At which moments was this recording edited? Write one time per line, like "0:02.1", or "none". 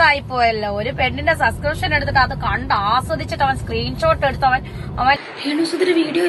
0:05.2